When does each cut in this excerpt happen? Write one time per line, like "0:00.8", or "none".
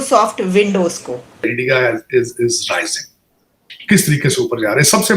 0:01.4